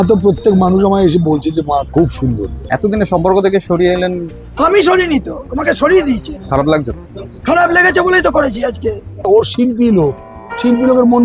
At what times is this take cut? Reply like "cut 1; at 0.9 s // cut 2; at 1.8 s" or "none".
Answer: cut 1; at 2.6 s // cut 2; at 6.3 s // cut 3; at 9.3 s